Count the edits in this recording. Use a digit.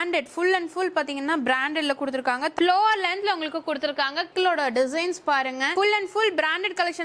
2